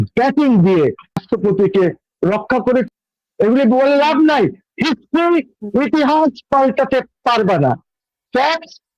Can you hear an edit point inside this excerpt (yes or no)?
yes